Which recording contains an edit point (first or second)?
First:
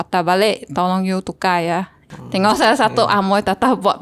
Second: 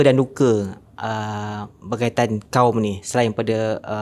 first